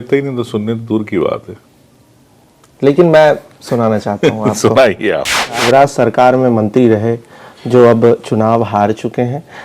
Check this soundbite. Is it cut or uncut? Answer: cut